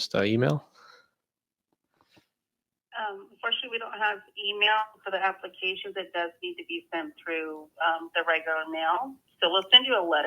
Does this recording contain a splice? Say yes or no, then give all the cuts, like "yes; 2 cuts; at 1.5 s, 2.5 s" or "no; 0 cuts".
no; 0 cuts